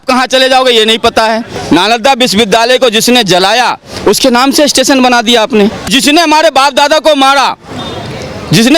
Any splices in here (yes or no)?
yes